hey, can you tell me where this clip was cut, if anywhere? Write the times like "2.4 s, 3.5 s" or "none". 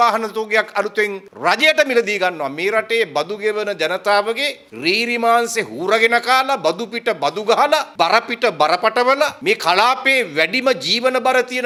none